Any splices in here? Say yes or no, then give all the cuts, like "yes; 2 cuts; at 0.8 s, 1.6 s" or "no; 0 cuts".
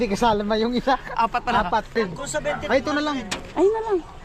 yes; 1 cut; at 2.0 s